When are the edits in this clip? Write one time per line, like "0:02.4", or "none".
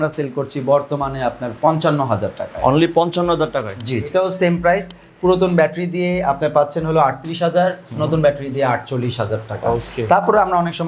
0:04.1